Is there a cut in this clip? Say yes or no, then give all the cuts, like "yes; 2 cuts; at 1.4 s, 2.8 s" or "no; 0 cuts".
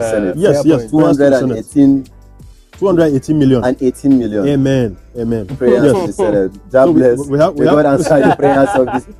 no; 0 cuts